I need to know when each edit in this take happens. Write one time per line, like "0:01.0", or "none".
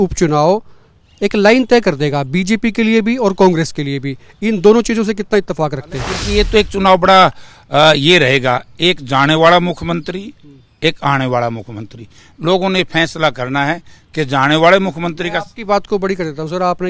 0:06.1